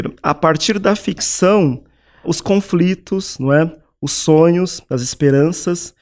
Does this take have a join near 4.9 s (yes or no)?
no